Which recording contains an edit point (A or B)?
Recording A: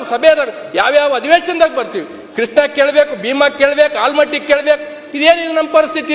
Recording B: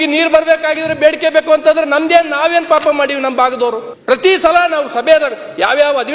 B